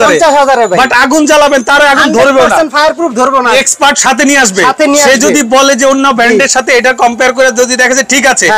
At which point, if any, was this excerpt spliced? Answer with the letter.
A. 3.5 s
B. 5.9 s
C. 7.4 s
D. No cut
A